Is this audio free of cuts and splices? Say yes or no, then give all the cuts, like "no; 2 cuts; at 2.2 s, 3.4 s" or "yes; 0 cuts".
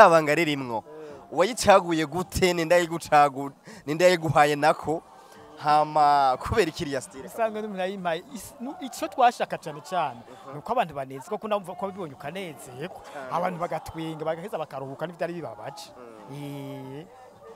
yes; 0 cuts